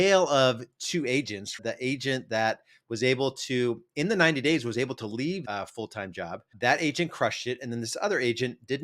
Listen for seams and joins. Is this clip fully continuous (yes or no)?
no